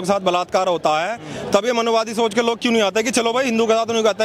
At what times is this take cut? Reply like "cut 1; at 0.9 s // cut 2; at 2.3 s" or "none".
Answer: none

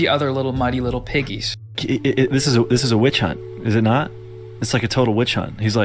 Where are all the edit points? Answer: cut 1; at 1.7 s

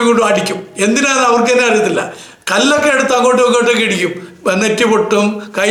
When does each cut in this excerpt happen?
none

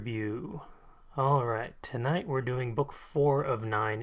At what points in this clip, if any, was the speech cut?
cut 1; at 1.0 s

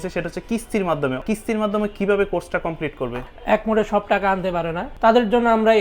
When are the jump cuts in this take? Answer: cut 1; at 1.2 s // cut 2; at 3.3 s // cut 3; at 4.8 s

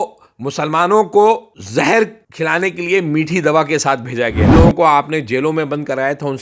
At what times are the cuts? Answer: cut 1; at 1.6 s // cut 2; at 2.2 s // cut 3; at 4.6 s

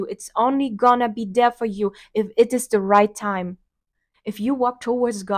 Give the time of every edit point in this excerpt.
cut 1; at 3.8 s

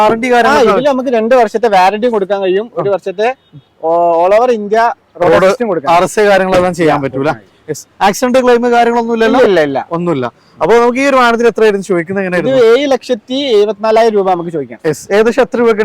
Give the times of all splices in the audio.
none

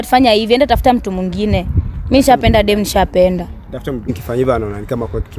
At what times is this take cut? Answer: cut 1; at 4.2 s

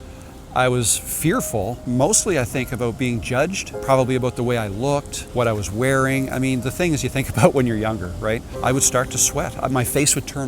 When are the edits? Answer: cut 1; at 1.8 s // cut 2; at 3.7 s // cut 3; at 5.2 s // cut 4; at 8.5 s

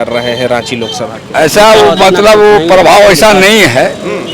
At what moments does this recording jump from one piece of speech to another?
cut 1; at 1.2 s

